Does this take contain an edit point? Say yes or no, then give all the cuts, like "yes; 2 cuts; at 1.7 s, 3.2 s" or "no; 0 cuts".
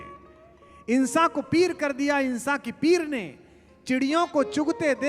no; 0 cuts